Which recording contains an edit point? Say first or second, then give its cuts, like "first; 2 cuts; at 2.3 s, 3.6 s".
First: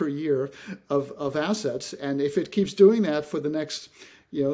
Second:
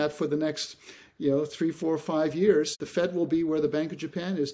second; 1 cut; at 2.8 s